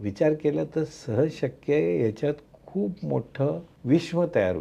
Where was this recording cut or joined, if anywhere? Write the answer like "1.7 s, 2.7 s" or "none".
3.7 s

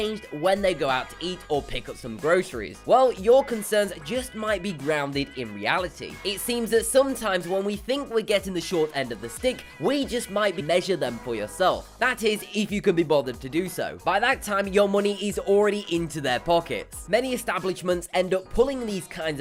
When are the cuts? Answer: none

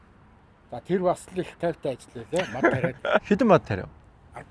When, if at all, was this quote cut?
3.2 s

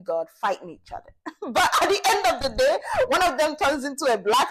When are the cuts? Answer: none

